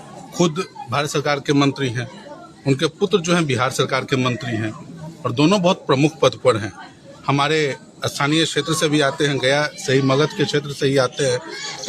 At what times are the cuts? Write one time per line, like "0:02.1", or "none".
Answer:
none